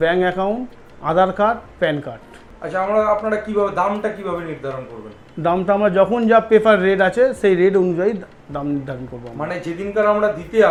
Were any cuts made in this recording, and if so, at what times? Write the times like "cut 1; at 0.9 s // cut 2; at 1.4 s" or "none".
none